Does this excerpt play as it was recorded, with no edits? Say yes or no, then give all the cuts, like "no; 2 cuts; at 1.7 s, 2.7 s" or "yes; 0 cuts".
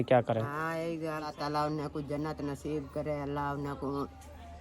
no; 1 cut; at 1.3 s